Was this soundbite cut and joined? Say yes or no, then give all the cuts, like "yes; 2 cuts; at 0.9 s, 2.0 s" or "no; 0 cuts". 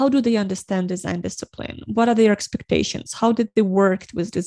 no; 0 cuts